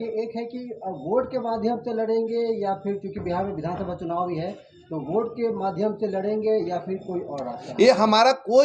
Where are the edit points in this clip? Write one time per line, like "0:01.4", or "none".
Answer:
none